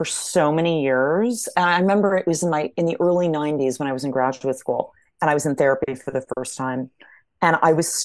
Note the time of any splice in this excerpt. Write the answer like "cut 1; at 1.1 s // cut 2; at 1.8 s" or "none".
cut 1; at 1.5 s